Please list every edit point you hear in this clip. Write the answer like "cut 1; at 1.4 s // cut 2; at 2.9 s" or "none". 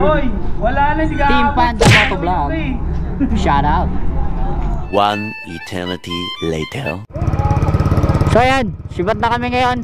none